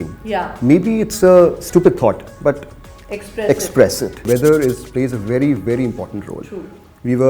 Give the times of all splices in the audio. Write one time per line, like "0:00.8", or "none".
0:04.2